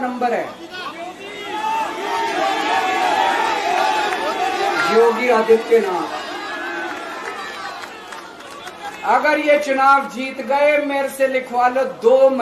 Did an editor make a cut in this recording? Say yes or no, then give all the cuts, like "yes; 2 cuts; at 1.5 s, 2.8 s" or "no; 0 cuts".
no; 0 cuts